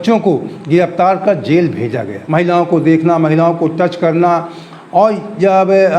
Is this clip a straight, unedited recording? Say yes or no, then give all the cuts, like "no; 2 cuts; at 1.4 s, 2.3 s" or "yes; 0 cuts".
no; 1 cut; at 2.1 s